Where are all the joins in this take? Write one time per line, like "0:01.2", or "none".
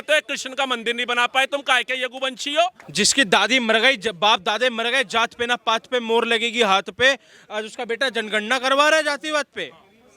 0:02.8